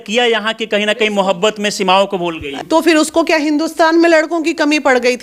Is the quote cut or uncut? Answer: cut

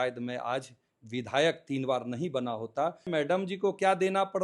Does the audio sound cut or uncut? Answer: cut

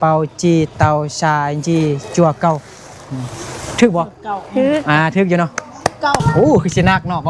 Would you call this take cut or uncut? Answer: cut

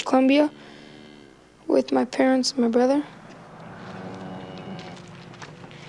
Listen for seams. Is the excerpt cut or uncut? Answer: uncut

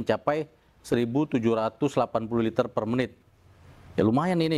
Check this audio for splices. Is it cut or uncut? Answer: uncut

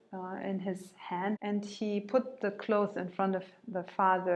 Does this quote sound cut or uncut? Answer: cut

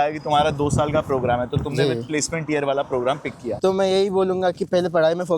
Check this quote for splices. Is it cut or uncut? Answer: cut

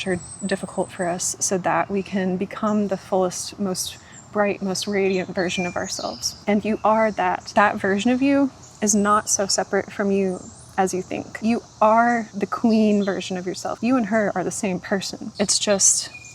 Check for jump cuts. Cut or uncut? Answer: cut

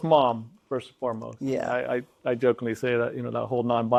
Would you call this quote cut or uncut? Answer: uncut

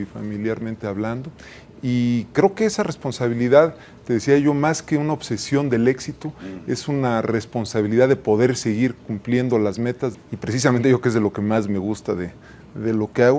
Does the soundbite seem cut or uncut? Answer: cut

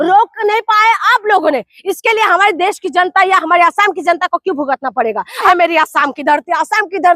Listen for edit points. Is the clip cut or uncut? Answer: cut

